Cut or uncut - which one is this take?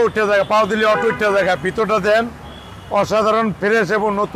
uncut